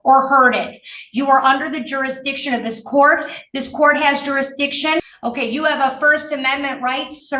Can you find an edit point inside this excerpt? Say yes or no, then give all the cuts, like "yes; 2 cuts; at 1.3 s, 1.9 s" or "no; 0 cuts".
yes; 1 cut; at 5.1 s